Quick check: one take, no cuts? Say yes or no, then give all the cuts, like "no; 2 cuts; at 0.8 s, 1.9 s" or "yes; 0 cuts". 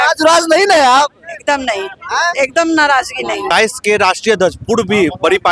no; 1 cut; at 3.5 s